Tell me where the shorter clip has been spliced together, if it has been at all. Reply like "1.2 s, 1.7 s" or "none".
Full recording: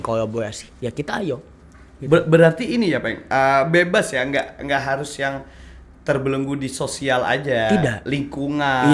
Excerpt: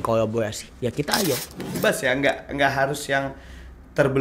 1.8 s